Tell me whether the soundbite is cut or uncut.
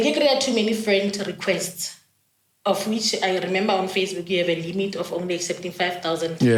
uncut